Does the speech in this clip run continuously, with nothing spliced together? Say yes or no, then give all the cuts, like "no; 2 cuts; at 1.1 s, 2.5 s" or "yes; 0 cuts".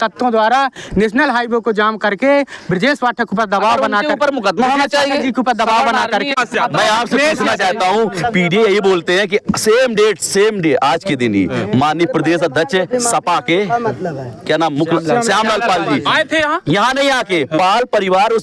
no; 1 cut; at 6.3 s